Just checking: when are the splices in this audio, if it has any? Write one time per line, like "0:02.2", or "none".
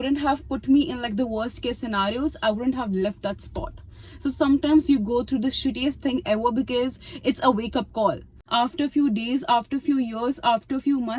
0:08.4